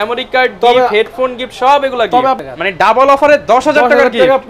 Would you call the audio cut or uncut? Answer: cut